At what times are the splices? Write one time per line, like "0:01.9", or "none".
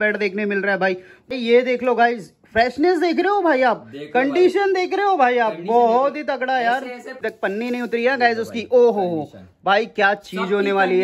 0:01.3
0:07.2